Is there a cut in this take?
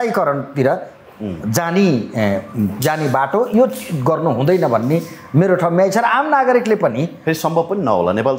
no; 0 cuts

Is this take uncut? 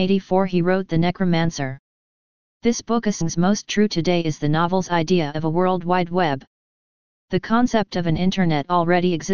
yes; 0 cuts

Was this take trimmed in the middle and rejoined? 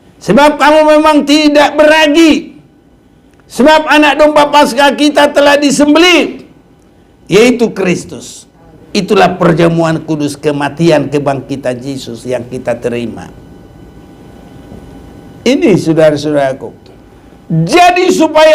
no; 0 cuts

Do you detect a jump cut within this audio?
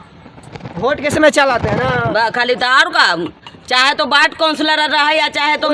no; 0 cuts

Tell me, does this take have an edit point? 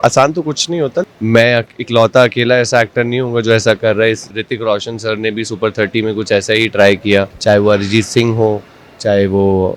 yes; 3 cuts; at 1.1 s, 4.3 s, 7.3 s

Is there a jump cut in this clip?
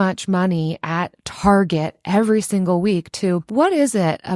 yes; 1 cut; at 3.5 s

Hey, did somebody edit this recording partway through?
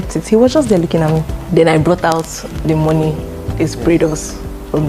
yes; 1 cut; at 1.4 s

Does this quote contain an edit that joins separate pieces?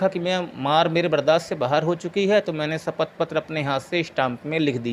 no; 0 cuts

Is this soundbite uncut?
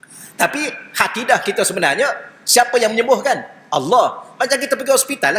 yes; 0 cuts

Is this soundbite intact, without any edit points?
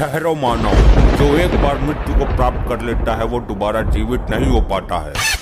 yes; 0 cuts

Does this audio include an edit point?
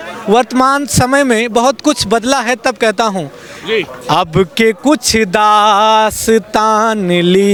no; 0 cuts

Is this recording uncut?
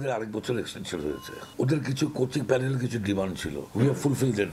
no; 1 cut; at 3.6 s

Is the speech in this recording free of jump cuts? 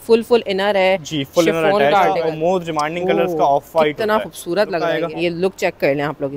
no; 2 cuts; at 2.1 s, 4.9 s

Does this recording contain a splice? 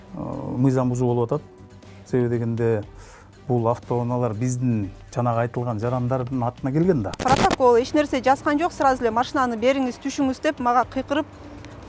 yes; 1 cut; at 7.1 s

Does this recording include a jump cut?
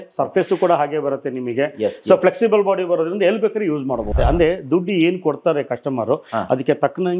yes; 1 cut; at 4.1 s

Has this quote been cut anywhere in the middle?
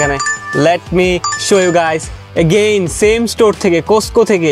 no; 0 cuts

